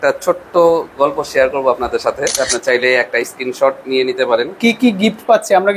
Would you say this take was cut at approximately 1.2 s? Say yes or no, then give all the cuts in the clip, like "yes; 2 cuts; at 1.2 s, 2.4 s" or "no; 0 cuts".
no; 1 cut; at 2.6 s